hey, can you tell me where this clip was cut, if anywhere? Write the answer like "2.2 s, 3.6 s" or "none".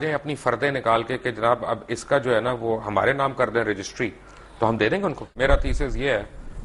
5.3 s

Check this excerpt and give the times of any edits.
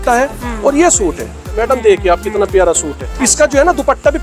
1.5 s, 3.0 s

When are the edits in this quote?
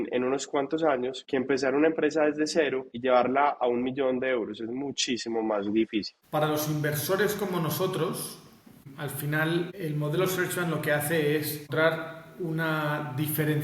1.2 s, 2.9 s, 6.2 s, 8.8 s, 9.7 s, 11.7 s

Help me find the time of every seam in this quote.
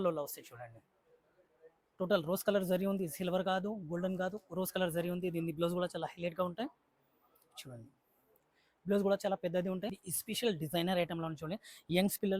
10.0 s

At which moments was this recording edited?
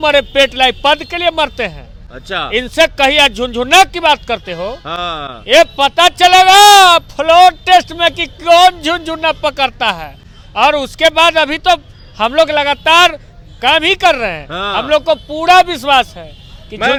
none

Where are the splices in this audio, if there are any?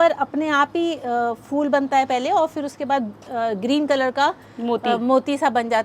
none

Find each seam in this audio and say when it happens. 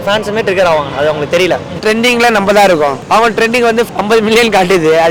1.8 s, 3.0 s, 3.9 s

